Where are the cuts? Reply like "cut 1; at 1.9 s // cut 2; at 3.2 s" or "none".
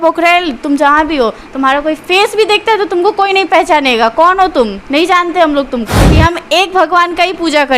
cut 1; at 5.9 s